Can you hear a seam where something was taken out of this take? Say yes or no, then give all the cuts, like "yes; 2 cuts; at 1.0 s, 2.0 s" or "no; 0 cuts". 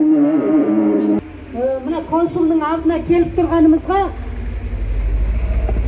yes; 1 cut; at 1.2 s